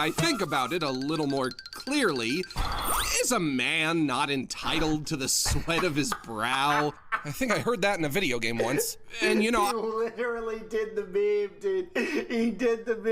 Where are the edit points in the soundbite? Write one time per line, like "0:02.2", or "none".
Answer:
none